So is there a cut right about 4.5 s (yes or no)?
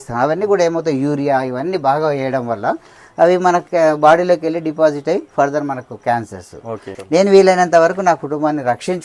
no